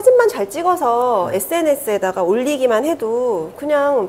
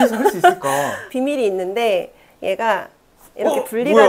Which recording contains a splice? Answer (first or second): second